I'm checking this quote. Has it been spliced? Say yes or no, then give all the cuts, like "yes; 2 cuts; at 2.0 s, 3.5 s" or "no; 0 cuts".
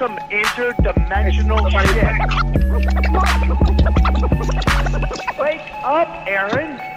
no; 0 cuts